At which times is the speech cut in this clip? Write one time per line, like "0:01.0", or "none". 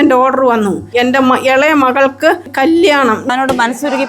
0:00.9
0:02.5
0:03.2